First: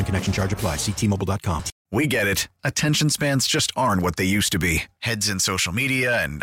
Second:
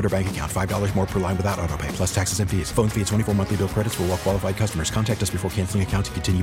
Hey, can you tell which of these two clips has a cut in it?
first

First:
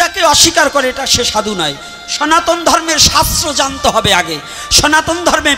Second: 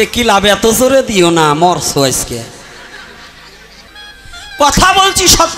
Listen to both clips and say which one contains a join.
second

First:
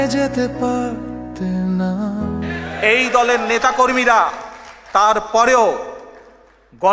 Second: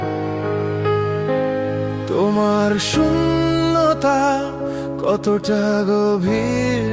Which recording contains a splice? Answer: first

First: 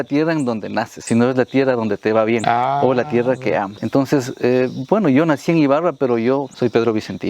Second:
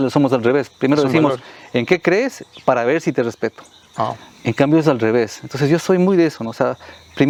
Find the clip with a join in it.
first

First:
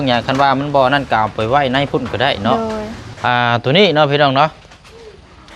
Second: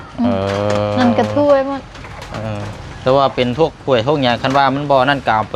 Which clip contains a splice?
first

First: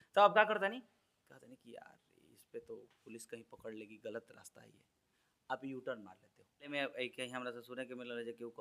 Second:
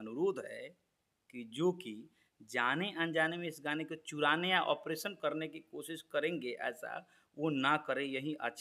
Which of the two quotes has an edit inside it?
first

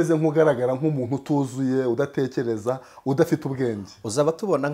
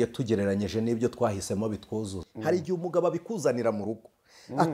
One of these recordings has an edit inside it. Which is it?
second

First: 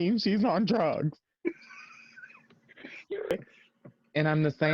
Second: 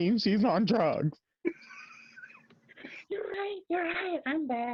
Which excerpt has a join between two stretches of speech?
first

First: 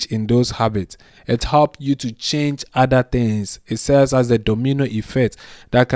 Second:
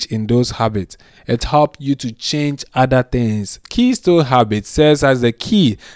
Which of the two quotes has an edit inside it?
second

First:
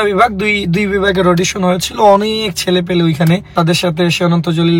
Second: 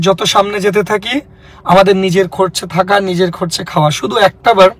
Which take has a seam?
first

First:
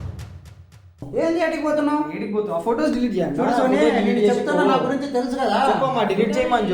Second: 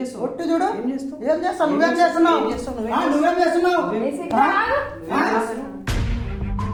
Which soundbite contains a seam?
first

